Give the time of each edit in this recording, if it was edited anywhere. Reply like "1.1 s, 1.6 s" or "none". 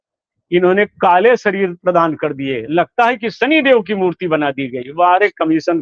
none